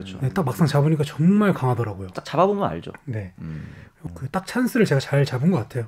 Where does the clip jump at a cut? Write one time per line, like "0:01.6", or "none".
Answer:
0:03.9

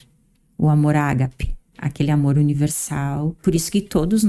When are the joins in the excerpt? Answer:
0:01.7
0:03.4

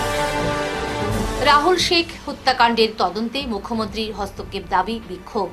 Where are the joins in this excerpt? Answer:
0:01.0

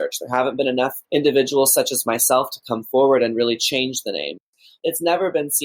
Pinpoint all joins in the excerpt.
0:01.0
0:04.5

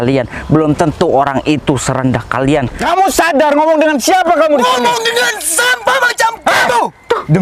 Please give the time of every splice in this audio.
0:02.7

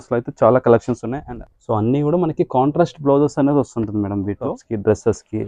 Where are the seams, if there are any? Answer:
0:01.1
0:04.6

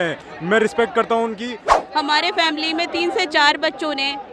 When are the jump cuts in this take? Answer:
0:01.6

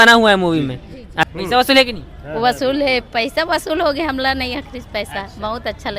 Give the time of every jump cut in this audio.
0:01.2

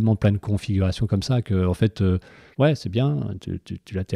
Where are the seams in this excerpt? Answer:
0:02.4

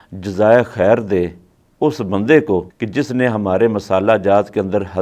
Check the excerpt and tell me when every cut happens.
0:02.8

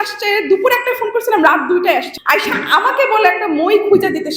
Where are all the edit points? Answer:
0:02.1

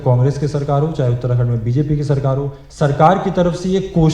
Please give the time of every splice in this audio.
0:02.6

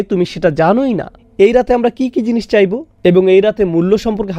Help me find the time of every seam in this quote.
0:01.1

